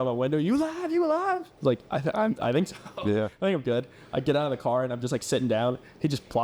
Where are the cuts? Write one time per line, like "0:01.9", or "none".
none